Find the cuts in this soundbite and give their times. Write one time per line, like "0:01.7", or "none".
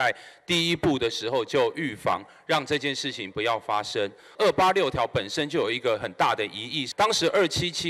0:04.2
0:06.8